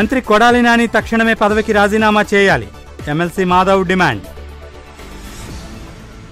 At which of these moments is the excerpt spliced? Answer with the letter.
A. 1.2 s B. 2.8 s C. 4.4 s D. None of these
D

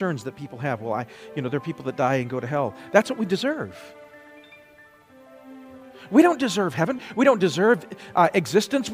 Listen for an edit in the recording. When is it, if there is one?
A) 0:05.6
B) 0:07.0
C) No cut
B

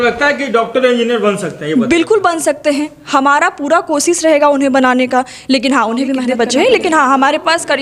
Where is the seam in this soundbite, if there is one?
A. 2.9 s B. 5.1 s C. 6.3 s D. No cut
C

